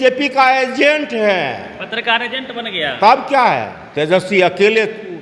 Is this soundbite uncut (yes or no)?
no